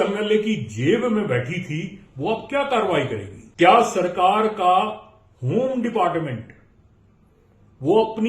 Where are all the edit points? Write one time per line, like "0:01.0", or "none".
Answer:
0:03.4